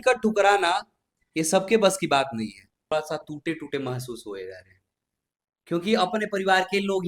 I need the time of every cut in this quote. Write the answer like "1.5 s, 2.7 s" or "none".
2.8 s